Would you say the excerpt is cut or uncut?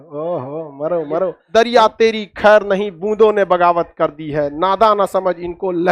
cut